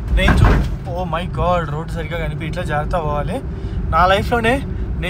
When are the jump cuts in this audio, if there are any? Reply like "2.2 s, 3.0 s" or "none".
none

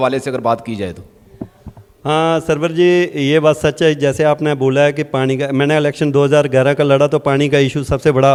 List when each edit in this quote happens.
none

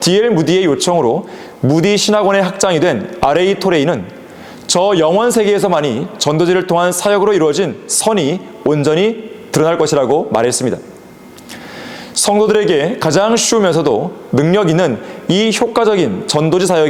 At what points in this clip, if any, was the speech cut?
none

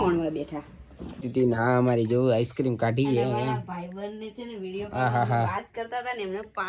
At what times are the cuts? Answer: 1.3 s

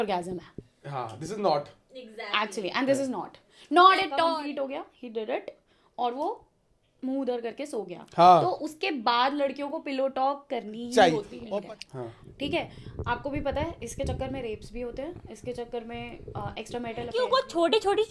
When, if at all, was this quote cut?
4.3 s, 11.4 s, 17.1 s

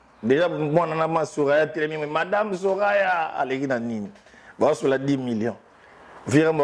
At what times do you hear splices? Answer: none

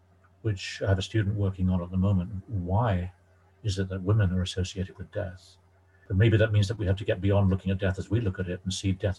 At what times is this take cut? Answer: 6.0 s

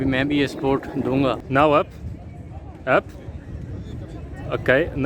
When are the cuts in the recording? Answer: 1.4 s

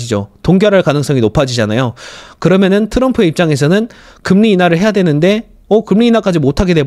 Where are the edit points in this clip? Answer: none

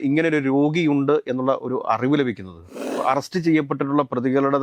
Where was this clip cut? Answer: 3.0 s

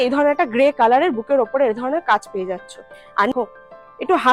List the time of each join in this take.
3.3 s

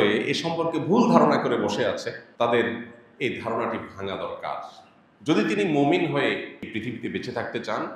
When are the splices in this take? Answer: 2.2 s, 6.6 s

